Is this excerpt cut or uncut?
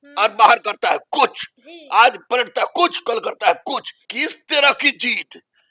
cut